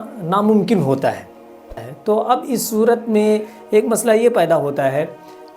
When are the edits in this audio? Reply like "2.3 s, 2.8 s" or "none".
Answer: 1.9 s